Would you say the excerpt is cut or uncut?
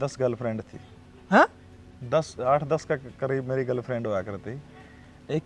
uncut